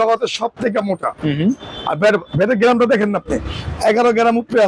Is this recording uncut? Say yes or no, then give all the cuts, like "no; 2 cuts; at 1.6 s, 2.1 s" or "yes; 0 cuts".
yes; 0 cuts